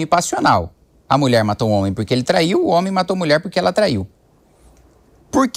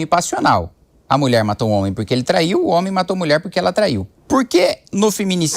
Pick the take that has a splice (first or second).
second